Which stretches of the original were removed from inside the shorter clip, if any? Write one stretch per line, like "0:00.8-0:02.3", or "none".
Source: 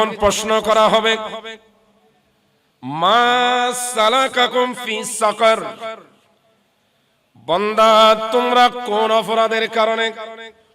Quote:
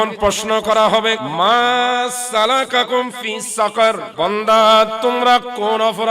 0:01.3-0:02.9
0:05.7-0:07.4